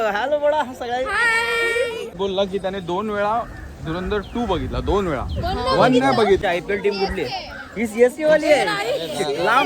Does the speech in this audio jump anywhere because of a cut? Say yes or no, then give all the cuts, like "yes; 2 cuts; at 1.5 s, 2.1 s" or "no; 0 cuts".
yes; 2 cuts; at 2.1 s, 6.4 s